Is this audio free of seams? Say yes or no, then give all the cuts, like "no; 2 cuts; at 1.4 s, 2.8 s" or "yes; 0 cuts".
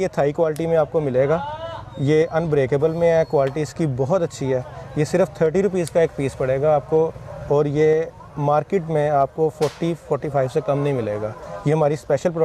yes; 0 cuts